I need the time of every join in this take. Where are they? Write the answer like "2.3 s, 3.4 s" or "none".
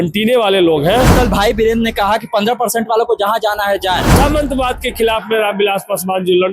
1.1 s, 4.1 s